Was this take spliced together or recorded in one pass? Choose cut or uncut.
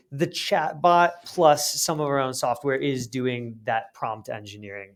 uncut